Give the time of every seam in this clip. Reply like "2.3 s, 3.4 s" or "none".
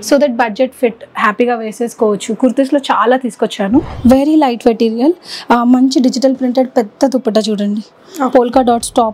3.9 s